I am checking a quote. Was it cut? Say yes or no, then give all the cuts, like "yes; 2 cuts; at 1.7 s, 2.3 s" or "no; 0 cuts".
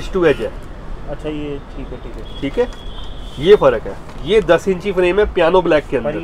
no; 0 cuts